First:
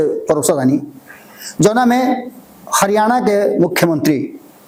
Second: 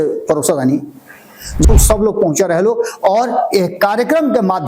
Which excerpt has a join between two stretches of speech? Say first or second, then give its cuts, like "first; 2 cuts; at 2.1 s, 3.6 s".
second; 1 cut; at 1.6 s